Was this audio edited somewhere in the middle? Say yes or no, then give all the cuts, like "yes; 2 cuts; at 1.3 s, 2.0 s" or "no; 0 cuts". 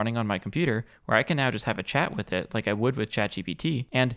no; 0 cuts